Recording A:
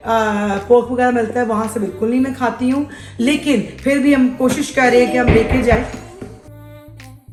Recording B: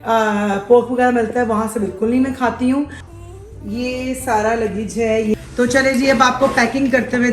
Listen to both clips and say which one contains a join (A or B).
B